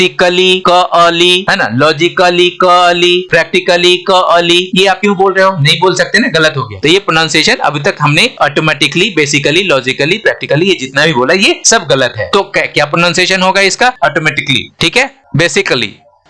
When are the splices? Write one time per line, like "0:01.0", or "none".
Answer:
none